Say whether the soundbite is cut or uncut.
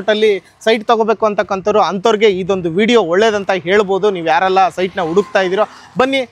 uncut